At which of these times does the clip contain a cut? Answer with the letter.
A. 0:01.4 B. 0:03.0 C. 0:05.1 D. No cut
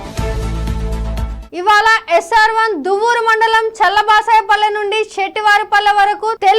A